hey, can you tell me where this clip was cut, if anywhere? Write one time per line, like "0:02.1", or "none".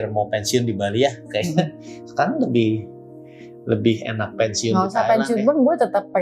none